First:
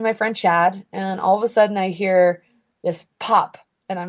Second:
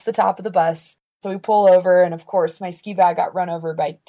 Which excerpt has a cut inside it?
second; 1 cut; at 1.2 s

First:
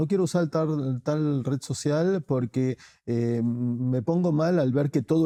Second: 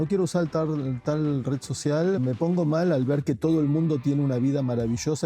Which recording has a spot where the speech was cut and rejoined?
second; 1 cut; at 2.2 s

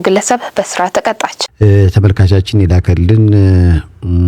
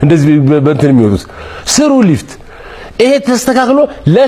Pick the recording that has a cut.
first; 1 cut; at 1.4 s

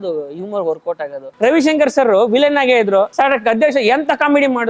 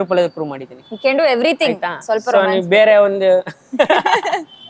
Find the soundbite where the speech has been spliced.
first; 2 cuts; at 1.2 s, 3.1 s

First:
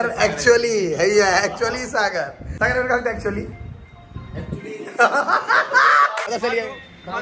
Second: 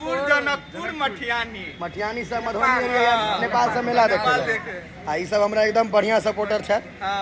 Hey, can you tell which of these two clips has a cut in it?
first; 2 cuts; at 2.4 s, 6.3 s

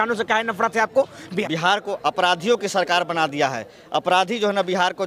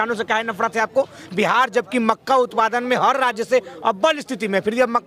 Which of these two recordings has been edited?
first; 1 cut; at 1.3 s

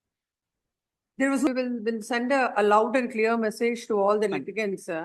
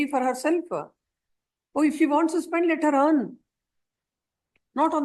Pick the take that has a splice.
first; 1 cut; at 1.5 s

